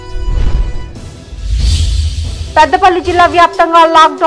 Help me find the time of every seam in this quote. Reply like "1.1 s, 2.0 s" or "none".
2.5 s